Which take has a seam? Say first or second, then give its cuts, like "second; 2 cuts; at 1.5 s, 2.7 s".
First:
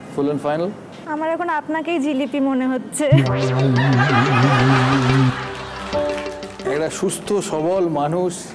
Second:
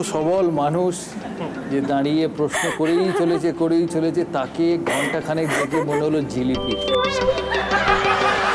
first; 2 cuts; at 0.9 s, 6.1 s